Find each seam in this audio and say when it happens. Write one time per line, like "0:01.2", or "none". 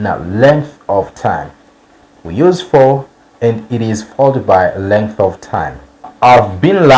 0:06.0